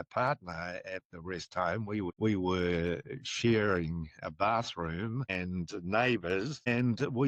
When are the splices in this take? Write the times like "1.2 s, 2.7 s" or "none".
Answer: none